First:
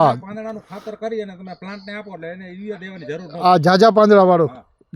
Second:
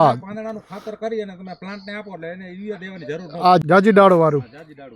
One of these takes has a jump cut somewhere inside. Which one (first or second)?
second